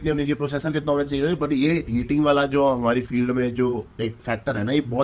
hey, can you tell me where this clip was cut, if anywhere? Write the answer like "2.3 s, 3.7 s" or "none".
none